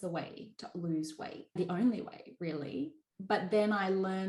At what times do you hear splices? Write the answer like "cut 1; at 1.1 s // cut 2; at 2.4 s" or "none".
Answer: cut 1; at 1.6 s